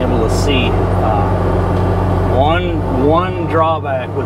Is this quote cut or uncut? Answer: uncut